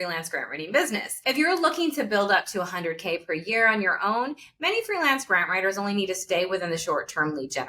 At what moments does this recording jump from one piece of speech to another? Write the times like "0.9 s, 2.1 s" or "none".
1.1 s